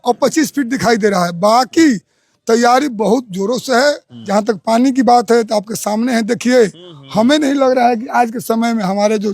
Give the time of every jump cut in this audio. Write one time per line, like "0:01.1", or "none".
0:04.1